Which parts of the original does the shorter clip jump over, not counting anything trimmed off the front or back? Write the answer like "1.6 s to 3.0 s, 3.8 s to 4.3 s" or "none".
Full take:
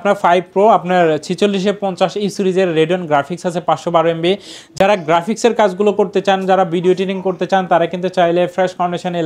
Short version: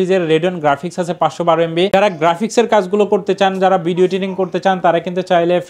4.4 s to 4.8 s